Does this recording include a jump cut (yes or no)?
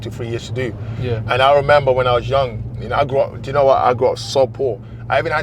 no